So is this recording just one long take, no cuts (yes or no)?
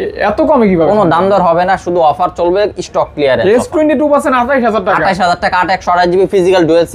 yes